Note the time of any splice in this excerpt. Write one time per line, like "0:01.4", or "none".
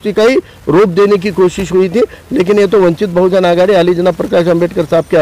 none